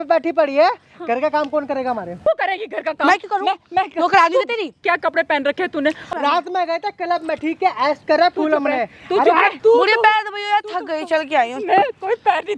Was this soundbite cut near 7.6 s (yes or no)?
no